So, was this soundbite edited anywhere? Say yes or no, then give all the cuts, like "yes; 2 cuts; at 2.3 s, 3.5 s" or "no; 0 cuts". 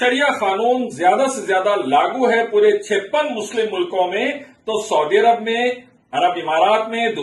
no; 0 cuts